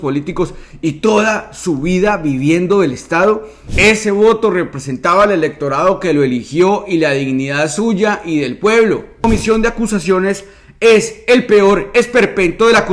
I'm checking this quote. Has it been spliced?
yes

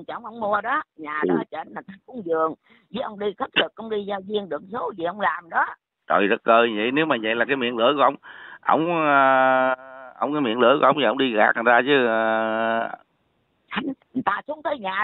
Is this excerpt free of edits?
yes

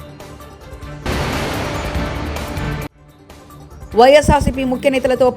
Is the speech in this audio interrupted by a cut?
yes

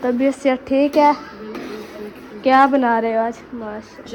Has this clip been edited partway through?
no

